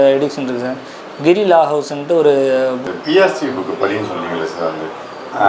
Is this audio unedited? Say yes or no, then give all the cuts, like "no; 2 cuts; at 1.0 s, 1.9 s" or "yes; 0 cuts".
no; 1 cut; at 2.9 s